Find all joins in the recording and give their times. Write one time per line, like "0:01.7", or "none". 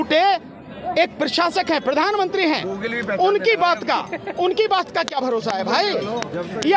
none